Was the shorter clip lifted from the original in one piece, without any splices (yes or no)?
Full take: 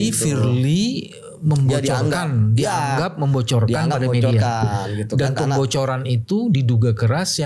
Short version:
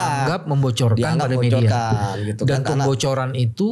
yes